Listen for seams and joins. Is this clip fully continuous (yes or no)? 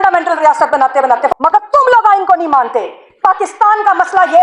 no